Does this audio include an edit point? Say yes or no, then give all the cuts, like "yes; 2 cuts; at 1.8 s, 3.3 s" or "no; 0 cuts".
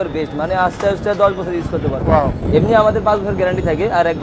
no; 0 cuts